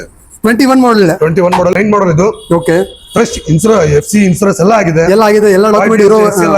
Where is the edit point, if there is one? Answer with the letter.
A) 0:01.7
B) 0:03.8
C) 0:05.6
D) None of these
A